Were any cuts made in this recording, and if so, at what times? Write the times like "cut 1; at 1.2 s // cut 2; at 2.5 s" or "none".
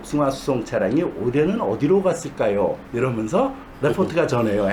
none